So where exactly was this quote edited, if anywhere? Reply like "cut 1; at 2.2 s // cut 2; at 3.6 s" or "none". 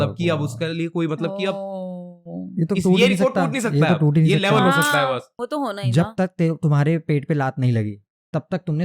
cut 1; at 5.3 s